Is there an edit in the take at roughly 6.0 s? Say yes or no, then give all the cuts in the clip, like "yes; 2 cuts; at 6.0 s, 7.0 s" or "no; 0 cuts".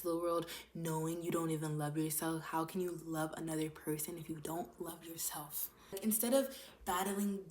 yes; 1 cut; at 6.0 s